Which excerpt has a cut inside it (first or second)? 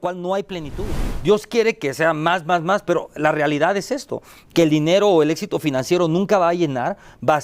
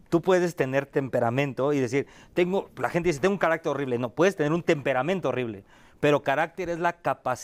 first